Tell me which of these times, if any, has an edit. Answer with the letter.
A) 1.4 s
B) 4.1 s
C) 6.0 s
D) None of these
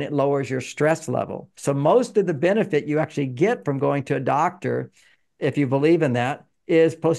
A